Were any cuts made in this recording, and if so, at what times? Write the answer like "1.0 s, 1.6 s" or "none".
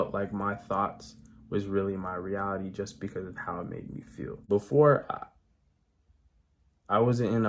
4.4 s